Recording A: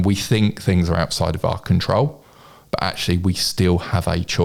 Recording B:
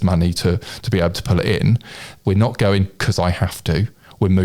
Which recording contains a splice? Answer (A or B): B